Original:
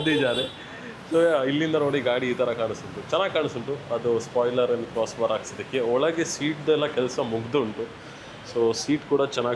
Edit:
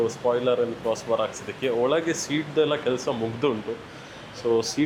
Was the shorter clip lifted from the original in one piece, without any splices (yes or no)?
yes